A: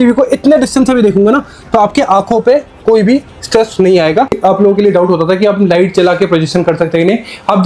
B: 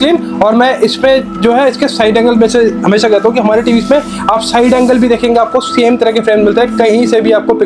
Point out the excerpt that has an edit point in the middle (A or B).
A